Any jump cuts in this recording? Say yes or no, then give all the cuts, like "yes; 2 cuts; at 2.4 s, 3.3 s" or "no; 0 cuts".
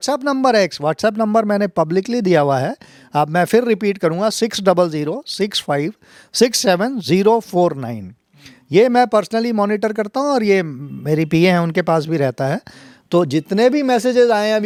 no; 0 cuts